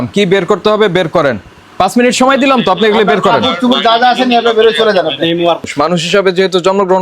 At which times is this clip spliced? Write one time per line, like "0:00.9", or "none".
0:01.7
0:05.7